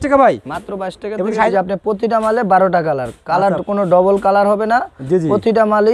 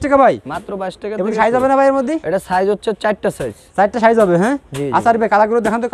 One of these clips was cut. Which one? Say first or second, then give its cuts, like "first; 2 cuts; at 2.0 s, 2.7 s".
first; 1 cut; at 1.5 s